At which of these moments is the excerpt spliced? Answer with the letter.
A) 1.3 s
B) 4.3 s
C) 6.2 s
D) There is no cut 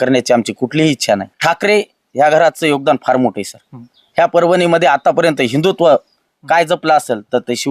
A